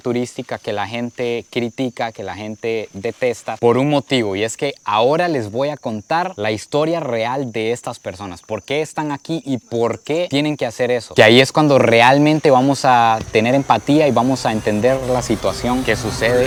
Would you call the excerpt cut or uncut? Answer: uncut